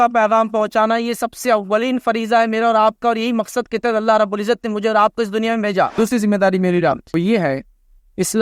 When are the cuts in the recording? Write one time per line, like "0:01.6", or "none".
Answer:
0:05.9
0:07.0